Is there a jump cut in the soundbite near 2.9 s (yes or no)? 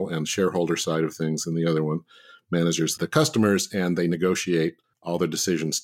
yes